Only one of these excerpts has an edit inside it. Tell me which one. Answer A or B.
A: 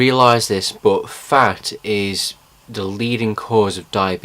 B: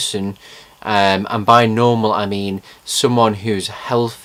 A